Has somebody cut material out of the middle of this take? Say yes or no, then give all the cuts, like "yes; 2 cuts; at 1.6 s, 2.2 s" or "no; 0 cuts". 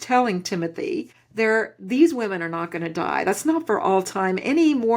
yes; 1 cut; at 1.2 s